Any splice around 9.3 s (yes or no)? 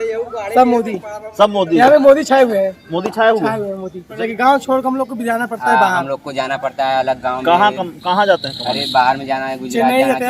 no